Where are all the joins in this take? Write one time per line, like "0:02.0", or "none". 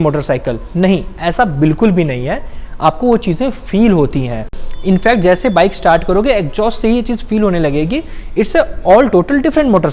none